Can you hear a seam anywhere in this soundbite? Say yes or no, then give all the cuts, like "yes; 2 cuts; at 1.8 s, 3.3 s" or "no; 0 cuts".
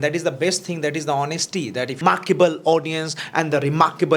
yes; 1 cut; at 2.0 s